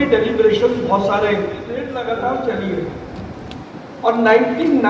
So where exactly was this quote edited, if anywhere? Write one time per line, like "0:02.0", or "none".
0:01.9

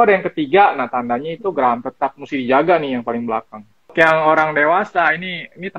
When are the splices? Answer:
0:03.8

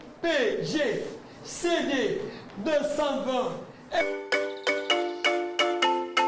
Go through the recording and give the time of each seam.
0:04.0

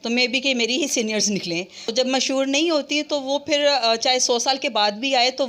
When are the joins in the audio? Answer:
0:01.9

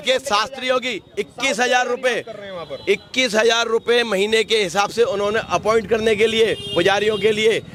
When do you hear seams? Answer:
none

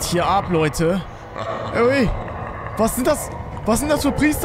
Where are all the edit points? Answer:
none

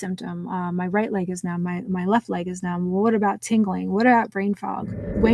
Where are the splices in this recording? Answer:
none

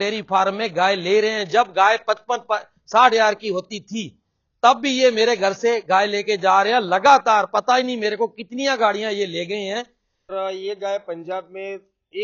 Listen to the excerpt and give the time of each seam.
0:10.3

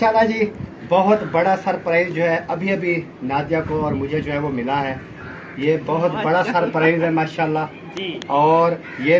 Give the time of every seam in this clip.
none

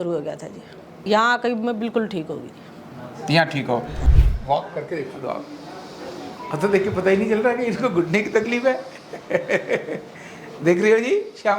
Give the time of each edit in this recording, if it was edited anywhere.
0:01.0
0:04.1

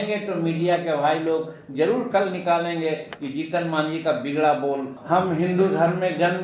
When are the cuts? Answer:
0:04.9

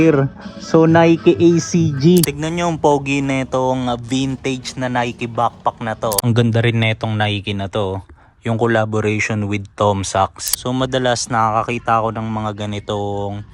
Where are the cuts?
0:02.4
0:06.2
0:10.5

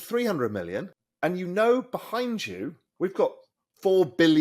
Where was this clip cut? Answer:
0:01.0
0:02.8

